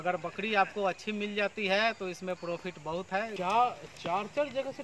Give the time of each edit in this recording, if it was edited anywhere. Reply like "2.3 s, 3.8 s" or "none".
3.3 s